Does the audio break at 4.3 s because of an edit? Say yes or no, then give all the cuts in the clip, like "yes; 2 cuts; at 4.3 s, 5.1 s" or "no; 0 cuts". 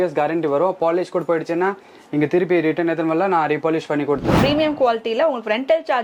yes; 1 cut; at 4.3 s